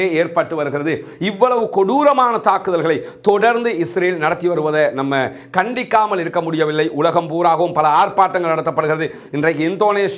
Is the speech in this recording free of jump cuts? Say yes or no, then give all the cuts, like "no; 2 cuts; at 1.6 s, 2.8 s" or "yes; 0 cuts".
yes; 0 cuts